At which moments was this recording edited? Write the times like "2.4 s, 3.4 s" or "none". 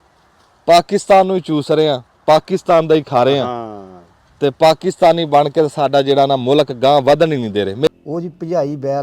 7.9 s